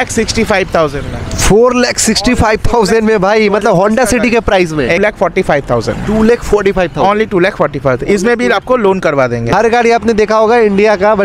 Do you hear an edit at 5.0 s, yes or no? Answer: yes